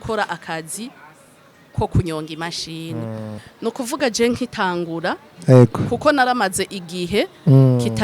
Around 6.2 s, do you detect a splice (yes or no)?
no